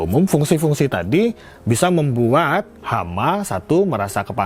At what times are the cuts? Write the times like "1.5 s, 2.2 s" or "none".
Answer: none